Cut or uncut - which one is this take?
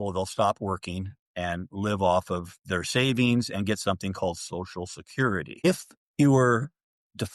cut